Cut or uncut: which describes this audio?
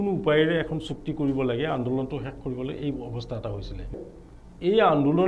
cut